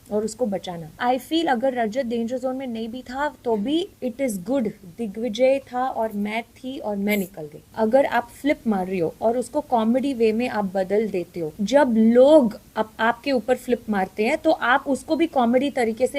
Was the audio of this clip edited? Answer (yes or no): yes